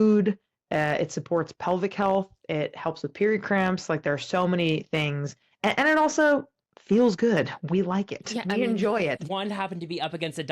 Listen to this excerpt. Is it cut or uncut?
cut